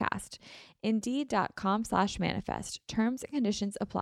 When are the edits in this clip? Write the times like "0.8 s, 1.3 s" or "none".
none